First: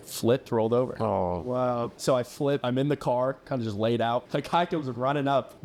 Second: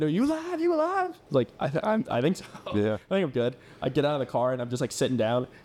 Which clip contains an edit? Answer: first; 2 cuts; at 2.3 s, 4.3 s

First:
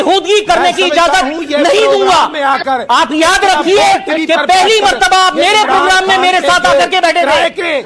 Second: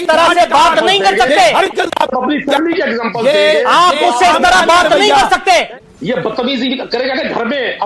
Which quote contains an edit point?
second; 1 cut; at 5.7 s

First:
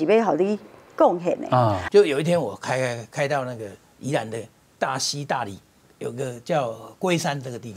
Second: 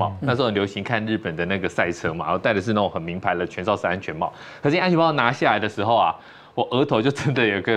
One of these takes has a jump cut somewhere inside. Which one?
first; 1 cut; at 1.8 s

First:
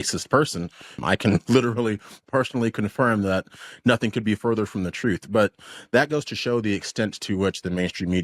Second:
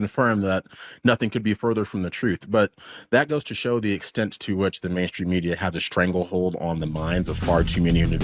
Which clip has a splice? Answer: first; 1 cut; at 1.0 s

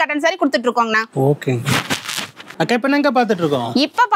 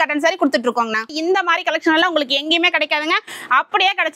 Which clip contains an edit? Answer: second; 1 cut; at 1.1 s

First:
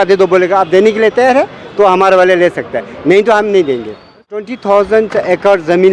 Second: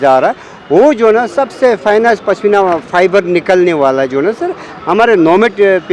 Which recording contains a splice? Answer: first; 1 cut; at 4.5 s

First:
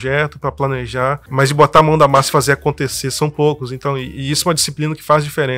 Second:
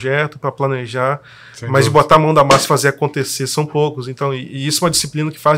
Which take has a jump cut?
first; 1 cut; at 1.2 s

